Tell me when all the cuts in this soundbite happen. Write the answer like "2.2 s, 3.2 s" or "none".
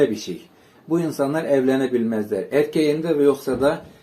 none